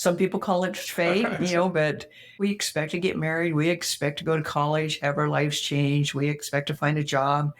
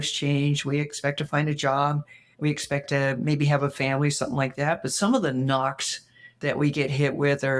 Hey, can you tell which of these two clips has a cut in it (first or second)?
first